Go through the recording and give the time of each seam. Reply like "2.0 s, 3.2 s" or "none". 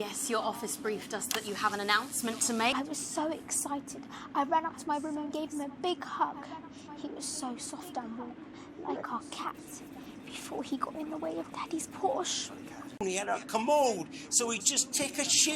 2.7 s, 13.0 s